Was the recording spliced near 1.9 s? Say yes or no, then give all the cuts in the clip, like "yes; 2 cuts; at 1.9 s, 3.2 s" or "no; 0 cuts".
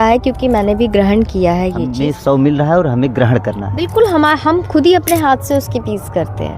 yes; 1 cut; at 1.9 s